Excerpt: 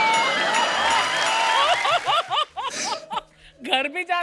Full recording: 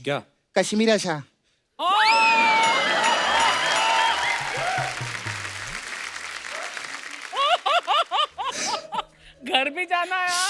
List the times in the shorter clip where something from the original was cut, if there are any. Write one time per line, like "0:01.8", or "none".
0:01.6